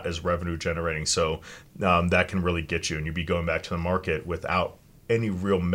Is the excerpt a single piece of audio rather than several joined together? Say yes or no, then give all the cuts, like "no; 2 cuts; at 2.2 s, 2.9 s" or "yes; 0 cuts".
no; 1 cut; at 1.5 s